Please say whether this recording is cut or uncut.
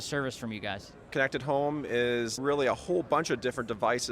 cut